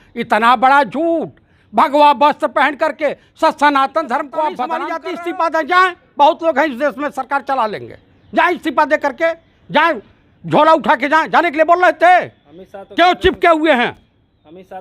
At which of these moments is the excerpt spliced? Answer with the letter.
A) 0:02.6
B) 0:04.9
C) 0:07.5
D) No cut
B